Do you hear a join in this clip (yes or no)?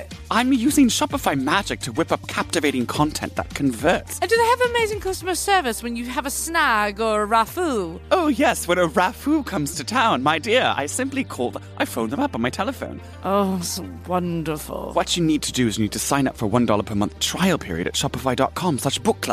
yes